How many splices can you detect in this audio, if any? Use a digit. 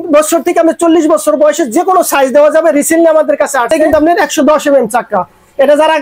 1